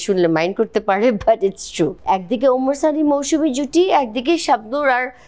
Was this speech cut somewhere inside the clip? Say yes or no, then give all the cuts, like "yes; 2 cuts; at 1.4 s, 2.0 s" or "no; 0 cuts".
yes; 1 cut; at 2.0 s